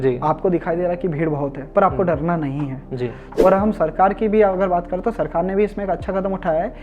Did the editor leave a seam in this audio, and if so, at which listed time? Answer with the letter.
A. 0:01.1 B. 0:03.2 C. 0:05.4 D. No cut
B